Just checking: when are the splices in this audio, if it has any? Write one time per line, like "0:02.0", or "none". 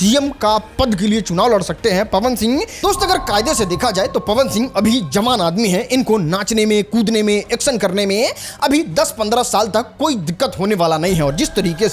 0:02.7